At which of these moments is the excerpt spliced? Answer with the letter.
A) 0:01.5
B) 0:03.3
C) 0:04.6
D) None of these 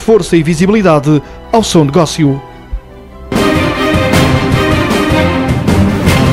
B